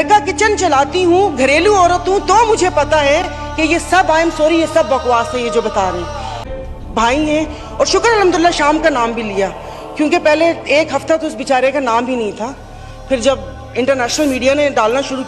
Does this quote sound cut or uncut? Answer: cut